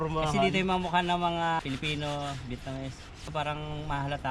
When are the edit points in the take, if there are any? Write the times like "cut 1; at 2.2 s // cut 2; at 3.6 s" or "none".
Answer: cut 1; at 1.6 s // cut 2; at 3.3 s